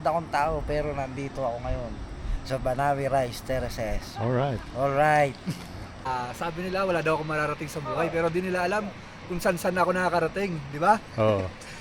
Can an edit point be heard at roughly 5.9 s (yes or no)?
yes